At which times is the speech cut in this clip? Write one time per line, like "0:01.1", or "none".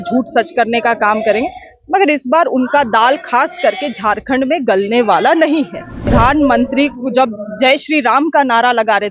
0:06.1